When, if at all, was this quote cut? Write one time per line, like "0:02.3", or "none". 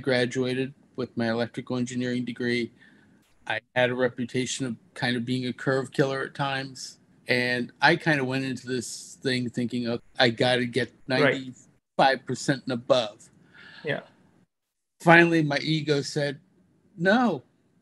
0:03.3
0:07.1
0:10.0
0:10.9